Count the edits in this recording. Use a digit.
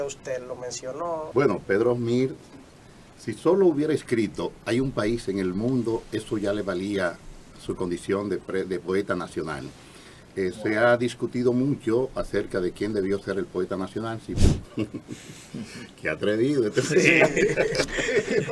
2